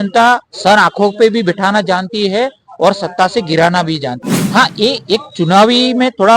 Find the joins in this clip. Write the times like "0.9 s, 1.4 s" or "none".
4.2 s